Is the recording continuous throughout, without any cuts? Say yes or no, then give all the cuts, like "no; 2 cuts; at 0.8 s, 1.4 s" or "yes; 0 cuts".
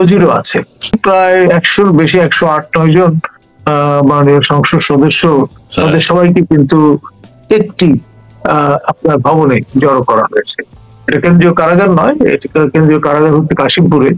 no; 1 cut; at 0.9 s